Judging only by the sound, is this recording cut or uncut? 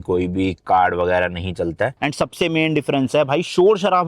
cut